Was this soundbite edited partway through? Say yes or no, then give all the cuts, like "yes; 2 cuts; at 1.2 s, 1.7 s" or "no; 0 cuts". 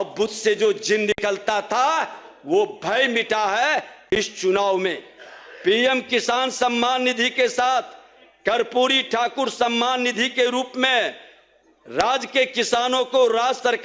no; 0 cuts